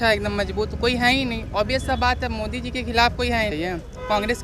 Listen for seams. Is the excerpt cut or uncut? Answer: cut